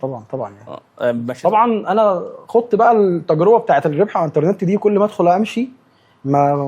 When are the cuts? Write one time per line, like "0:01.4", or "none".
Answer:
0:01.3